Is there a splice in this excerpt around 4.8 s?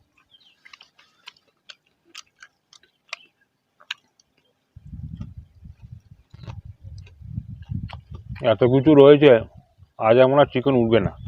no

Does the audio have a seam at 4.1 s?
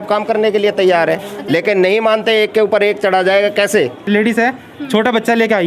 yes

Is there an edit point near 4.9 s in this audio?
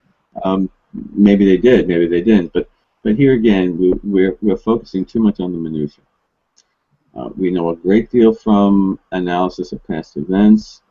yes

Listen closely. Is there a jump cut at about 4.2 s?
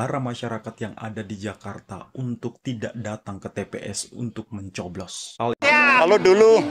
no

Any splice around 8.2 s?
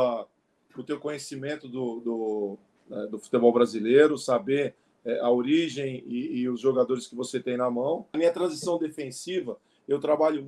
yes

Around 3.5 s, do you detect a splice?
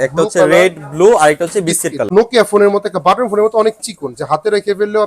no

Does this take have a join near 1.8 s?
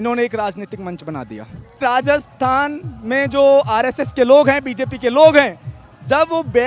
yes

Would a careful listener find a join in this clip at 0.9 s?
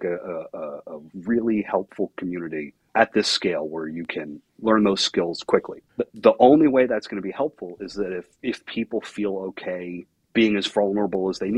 no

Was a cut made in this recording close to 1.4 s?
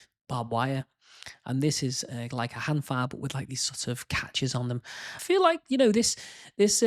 no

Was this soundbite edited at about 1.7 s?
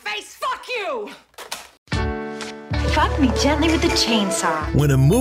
yes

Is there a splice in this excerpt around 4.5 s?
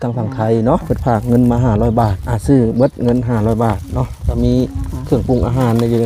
no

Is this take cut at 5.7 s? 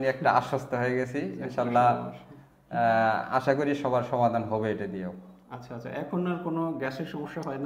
no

